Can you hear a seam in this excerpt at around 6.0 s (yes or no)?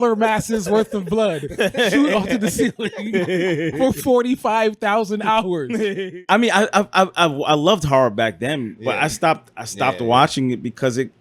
yes